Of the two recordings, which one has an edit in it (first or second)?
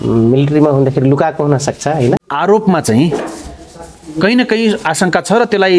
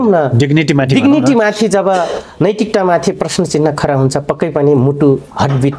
first